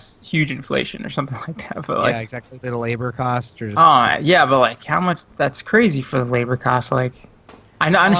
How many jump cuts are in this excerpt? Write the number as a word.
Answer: one